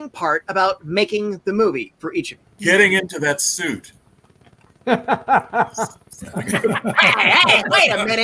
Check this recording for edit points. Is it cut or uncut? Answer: cut